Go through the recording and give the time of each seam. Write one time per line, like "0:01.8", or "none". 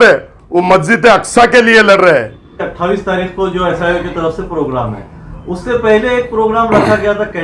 0:02.6